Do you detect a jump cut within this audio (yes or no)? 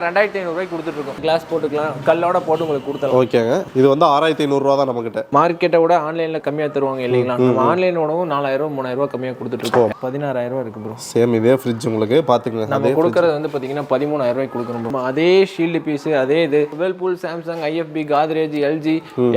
yes